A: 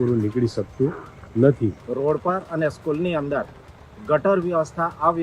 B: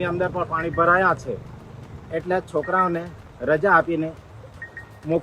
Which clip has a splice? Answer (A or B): A